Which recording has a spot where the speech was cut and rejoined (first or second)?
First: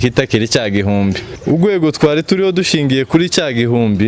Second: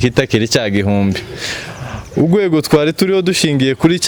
first